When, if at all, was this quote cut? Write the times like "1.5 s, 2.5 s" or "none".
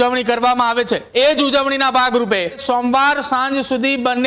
1.1 s, 2.6 s